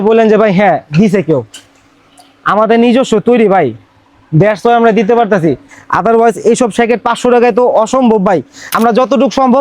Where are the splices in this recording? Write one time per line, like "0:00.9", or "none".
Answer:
0:08.6